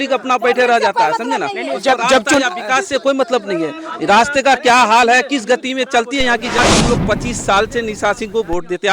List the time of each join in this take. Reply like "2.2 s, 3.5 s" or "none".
6.6 s